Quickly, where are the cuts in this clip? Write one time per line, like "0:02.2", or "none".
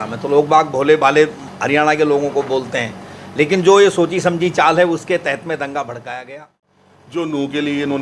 0:06.8